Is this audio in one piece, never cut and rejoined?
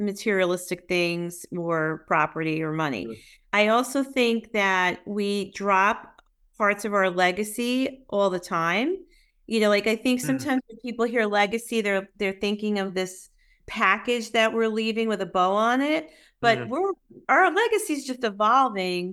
no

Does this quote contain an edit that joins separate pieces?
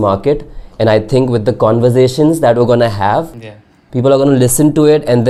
no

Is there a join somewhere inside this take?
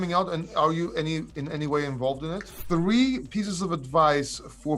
yes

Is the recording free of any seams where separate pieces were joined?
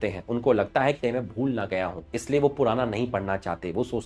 yes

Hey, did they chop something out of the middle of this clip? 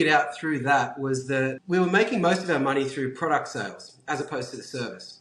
yes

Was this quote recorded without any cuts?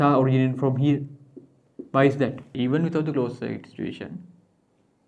no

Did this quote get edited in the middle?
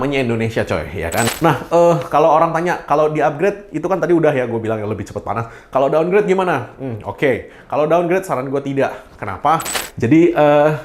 yes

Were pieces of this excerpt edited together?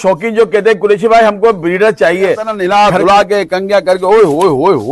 yes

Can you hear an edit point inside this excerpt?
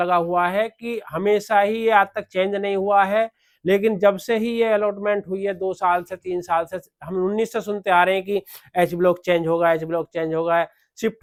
no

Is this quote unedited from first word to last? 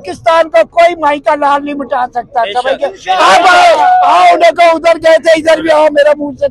yes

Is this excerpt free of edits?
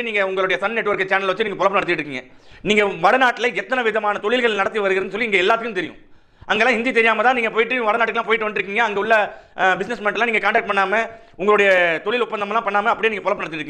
yes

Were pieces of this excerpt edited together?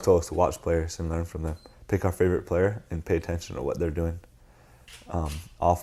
no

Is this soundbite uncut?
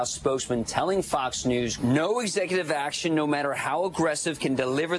no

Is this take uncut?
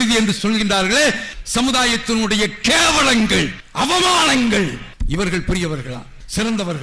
no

